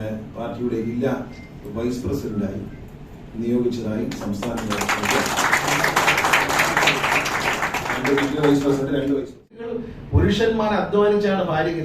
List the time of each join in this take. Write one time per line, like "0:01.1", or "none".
0:09.8

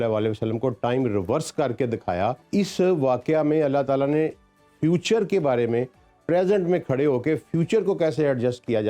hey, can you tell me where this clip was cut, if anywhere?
0:02.4

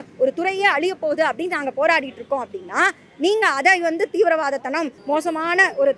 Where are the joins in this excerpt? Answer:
0:05.0

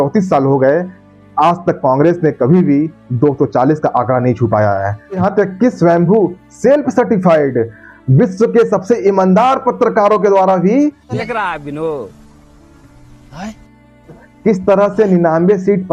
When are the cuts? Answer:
0:05.2
0:11.0

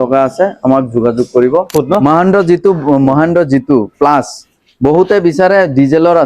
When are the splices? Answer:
0:01.7

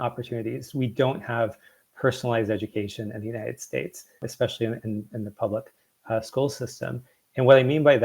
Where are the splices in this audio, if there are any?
0:04.3

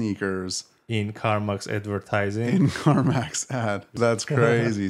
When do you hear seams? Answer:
0:03.9

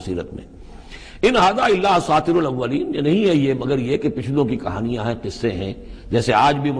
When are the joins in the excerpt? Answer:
none

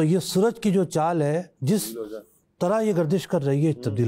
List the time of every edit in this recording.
none

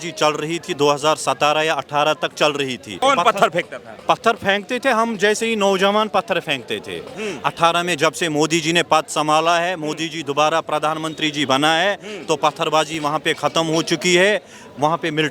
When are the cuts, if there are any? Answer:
0:03.0
0:07.0
0:12.9

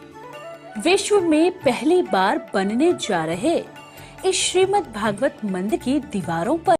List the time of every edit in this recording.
0:05.7

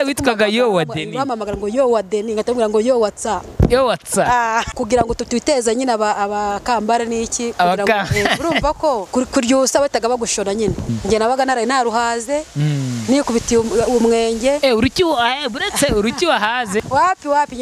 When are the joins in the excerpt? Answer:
0:04.7
0:09.1
0:10.9
0:16.9

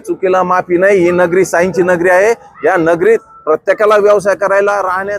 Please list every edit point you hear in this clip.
none

